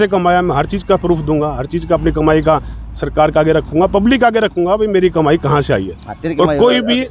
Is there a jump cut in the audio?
no; 0 cuts

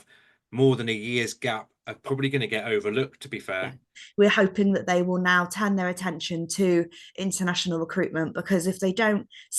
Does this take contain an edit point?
yes; 1 cut; at 3.9 s

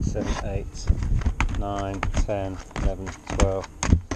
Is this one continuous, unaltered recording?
yes; 0 cuts

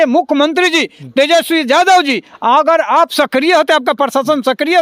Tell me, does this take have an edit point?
no; 0 cuts

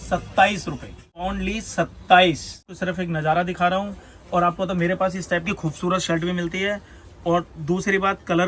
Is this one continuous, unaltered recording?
no; 2 cuts; at 1.1 s, 2.6 s

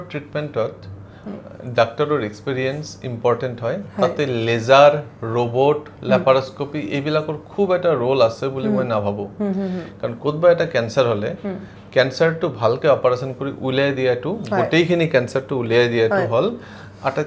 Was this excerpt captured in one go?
yes; 0 cuts

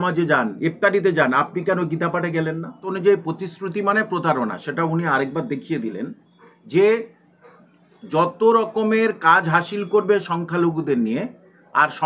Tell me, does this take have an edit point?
yes; 1 cut; at 2.9 s

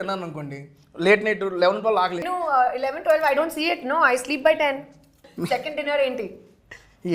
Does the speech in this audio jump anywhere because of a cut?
yes; 2 cuts; at 2.2 s, 5.3 s

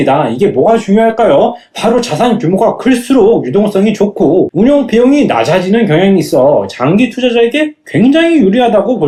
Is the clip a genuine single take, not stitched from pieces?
yes; 0 cuts

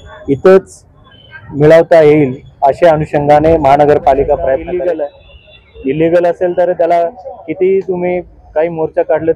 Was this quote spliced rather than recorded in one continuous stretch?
yes; 1 cut; at 4.6 s

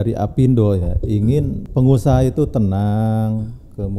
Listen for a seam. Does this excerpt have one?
yes; 1 cut; at 1.6 s

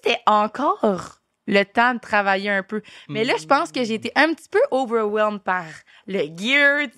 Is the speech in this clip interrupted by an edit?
no; 0 cuts

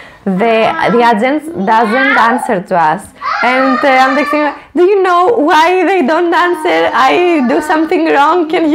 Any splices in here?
no; 0 cuts

